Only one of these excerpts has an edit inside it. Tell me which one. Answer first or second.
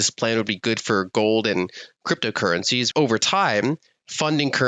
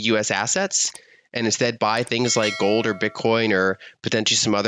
first